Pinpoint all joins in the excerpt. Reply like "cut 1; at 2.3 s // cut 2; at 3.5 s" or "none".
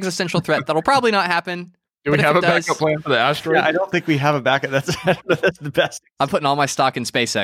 cut 1; at 6.0 s